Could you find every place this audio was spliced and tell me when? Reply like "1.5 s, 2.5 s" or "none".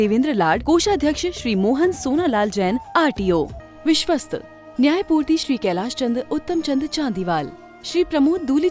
3.6 s